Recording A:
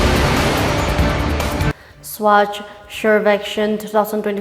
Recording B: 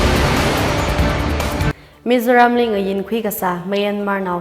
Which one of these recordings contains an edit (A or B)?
B